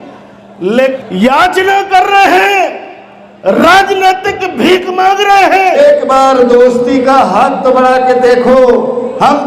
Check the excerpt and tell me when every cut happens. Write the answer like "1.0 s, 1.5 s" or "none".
1.0 s, 5.8 s